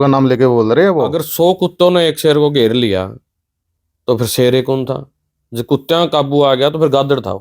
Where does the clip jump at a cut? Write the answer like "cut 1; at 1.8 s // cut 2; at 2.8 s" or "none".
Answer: cut 1; at 1.2 s